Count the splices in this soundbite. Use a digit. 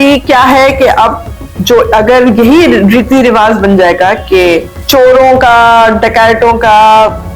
1